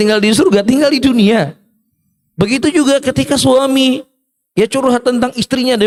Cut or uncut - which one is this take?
uncut